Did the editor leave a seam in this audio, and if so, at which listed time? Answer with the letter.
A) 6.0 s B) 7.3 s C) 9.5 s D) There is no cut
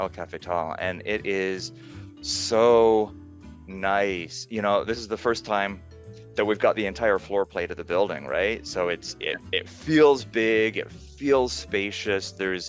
D